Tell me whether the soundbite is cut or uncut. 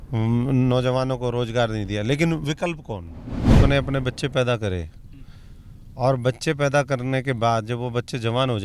cut